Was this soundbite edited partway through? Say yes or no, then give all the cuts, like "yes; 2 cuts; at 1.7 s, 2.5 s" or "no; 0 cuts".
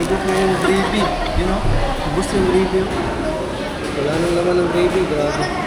no; 0 cuts